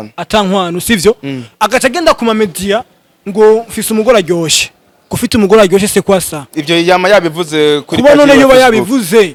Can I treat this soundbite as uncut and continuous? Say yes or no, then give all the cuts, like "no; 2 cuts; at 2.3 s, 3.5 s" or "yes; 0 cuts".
yes; 0 cuts